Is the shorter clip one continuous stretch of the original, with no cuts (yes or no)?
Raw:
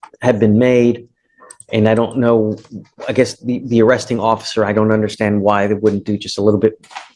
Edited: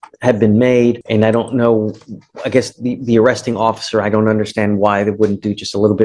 no